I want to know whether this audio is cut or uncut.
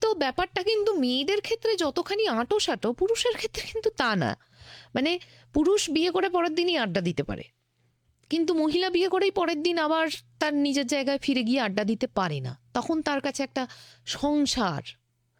uncut